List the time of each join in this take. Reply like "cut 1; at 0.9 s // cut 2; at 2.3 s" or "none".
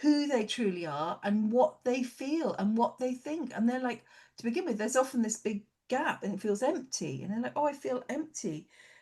none